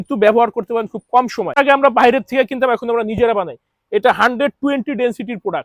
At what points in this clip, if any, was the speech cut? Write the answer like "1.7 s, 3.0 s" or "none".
1.6 s